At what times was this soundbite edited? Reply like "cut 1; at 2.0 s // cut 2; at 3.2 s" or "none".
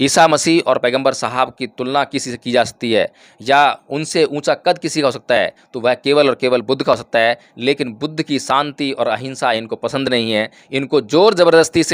none